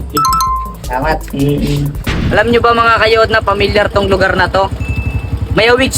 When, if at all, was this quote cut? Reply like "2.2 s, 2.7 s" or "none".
2.1 s